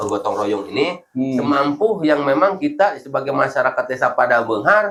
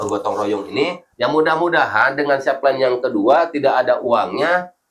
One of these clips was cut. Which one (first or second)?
second